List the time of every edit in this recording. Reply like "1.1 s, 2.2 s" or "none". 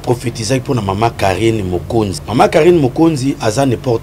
2.2 s